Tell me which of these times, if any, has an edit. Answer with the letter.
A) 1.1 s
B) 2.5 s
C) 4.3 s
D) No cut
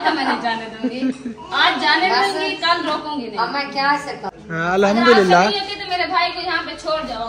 C